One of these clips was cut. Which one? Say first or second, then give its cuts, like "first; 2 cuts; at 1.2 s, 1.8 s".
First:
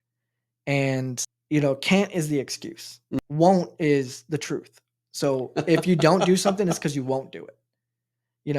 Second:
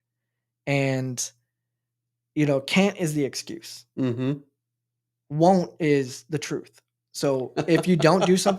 first; 2 cuts; at 1.3 s, 3.2 s